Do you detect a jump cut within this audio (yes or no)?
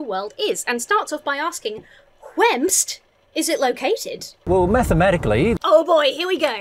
yes